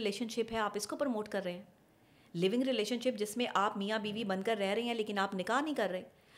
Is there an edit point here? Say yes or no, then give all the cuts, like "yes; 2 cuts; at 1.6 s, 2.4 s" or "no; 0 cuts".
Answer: no; 0 cuts